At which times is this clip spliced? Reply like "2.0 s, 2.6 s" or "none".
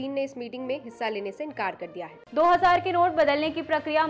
2.2 s